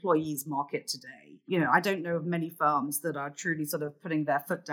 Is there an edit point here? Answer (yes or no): no